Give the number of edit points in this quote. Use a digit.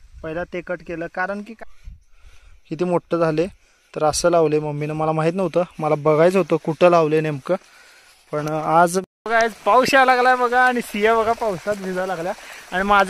2